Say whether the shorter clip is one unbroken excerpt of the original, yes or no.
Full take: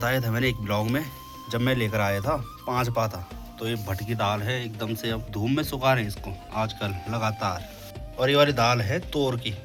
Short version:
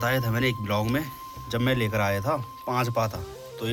yes